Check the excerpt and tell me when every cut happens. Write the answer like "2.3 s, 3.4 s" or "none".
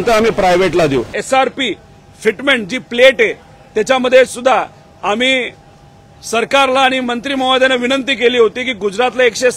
1.1 s